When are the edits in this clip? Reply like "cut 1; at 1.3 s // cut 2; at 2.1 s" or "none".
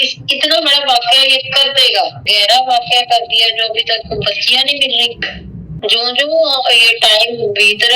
cut 1; at 2.3 s // cut 2; at 5.6 s

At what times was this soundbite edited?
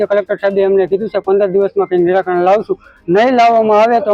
none

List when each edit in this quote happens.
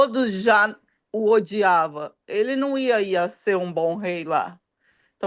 none

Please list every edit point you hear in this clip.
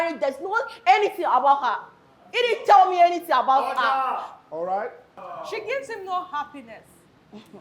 cut 1; at 5.2 s

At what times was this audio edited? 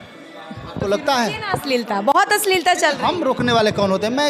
none

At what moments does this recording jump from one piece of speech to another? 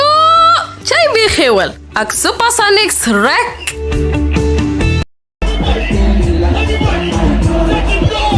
cut 1; at 5.0 s

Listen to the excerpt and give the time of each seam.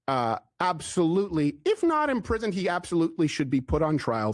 none

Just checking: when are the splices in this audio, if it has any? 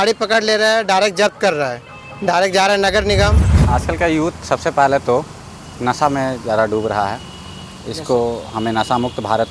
cut 1; at 3.5 s

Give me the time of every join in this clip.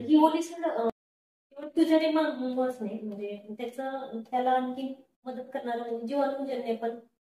cut 1; at 0.9 s

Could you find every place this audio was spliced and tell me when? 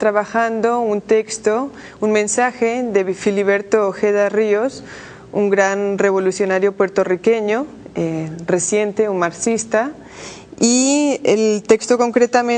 none

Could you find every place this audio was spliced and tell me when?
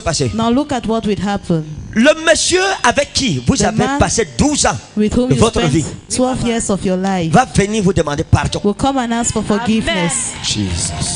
none

